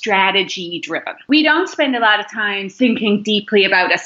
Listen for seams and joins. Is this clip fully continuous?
no; 2 cuts; at 1.3 s, 2.7 s

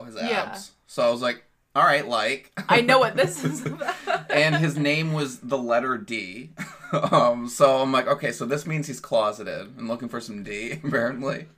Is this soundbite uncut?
yes; 0 cuts

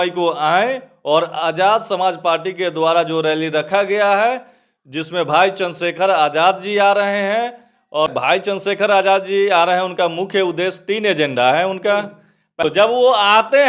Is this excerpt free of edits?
no; 2 cuts; at 8.1 s, 12.6 s

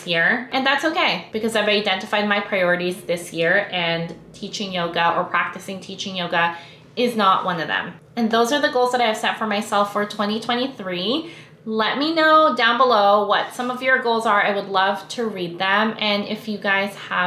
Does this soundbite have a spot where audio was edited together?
no; 0 cuts

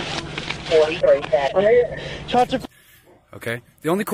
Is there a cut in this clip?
yes; 2 cuts; at 1.5 s, 2.6 s

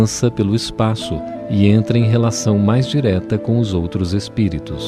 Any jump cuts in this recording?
yes; 1 cut; at 1.3 s

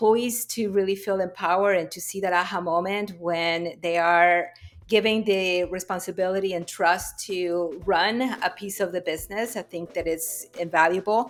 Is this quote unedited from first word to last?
yes; 0 cuts

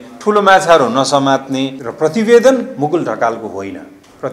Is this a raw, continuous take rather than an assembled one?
no; 1 cut; at 1.8 s

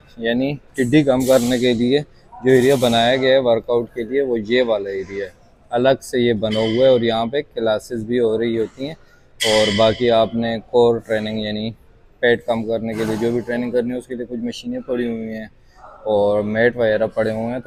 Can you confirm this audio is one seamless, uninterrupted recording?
yes; 0 cuts

